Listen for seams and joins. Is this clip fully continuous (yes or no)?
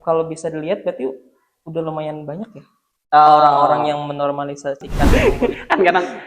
no